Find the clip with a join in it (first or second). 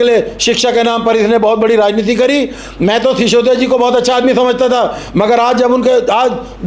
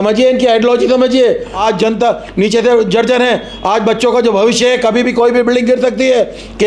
second